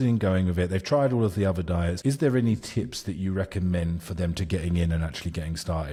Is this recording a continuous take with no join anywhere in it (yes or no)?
yes